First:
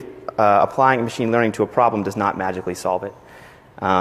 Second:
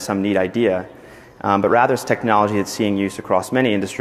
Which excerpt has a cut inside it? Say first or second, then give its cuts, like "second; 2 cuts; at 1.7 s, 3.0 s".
first; 1 cut; at 3.1 s